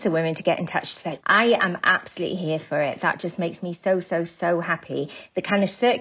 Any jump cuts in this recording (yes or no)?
yes